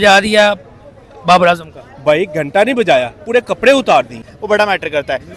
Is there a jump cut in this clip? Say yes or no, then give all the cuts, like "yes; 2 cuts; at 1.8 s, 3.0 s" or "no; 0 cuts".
yes; 1 cut; at 4.3 s